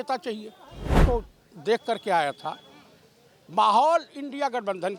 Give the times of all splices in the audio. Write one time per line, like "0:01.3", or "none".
0:01.0